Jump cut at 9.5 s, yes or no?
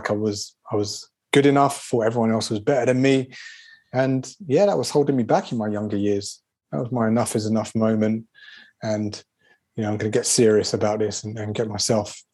no